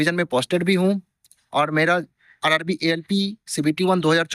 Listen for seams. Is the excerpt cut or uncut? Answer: uncut